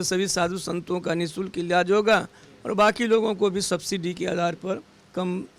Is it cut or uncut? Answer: uncut